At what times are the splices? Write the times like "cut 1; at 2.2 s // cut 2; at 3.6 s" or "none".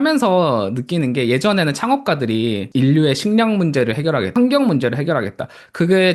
cut 1; at 2.6 s // cut 2; at 4.3 s